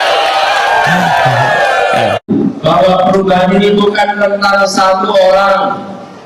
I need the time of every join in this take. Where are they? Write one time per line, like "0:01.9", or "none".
0:02.3